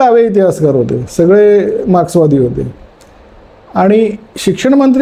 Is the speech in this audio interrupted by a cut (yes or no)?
no